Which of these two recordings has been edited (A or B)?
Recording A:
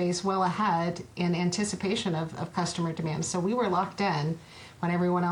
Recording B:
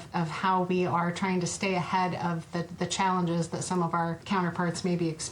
B